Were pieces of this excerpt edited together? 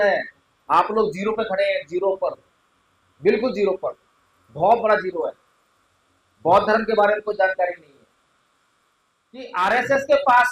yes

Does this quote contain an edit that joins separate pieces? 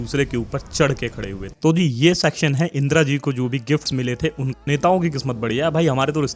yes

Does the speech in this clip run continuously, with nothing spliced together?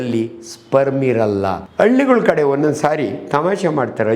no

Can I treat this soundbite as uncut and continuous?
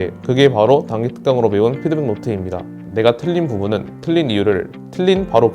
no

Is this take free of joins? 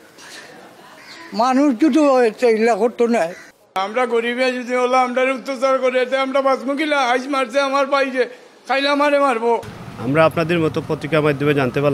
yes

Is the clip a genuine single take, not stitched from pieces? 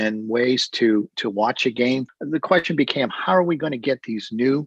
no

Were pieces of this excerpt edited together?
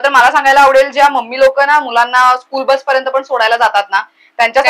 no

